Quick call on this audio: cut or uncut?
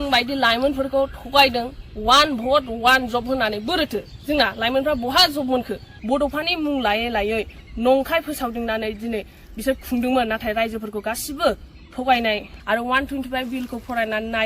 cut